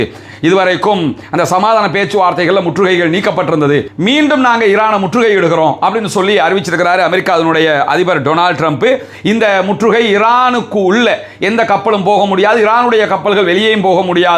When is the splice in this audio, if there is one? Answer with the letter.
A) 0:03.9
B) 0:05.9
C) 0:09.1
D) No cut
D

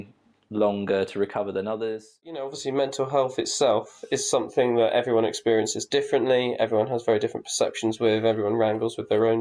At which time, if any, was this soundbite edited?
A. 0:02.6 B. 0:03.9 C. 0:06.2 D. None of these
A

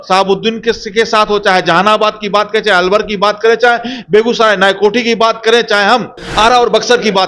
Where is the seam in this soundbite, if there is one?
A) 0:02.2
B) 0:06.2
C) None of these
B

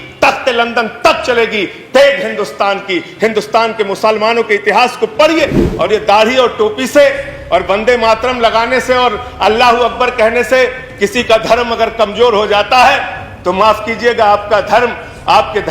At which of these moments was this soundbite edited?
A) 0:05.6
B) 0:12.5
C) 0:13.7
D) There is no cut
A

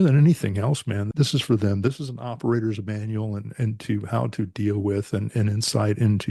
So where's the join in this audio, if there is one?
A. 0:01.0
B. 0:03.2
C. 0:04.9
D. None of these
D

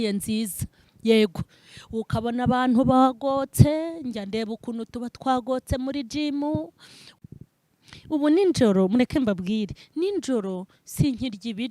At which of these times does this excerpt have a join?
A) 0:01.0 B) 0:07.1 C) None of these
B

